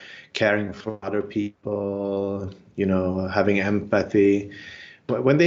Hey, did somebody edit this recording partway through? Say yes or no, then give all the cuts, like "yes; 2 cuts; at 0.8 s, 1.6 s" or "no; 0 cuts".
no; 0 cuts